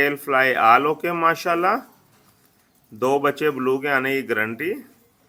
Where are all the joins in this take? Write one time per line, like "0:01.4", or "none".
none